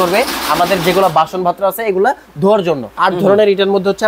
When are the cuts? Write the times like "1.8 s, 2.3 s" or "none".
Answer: 2.9 s